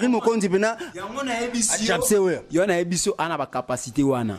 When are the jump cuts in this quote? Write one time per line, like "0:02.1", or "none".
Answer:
none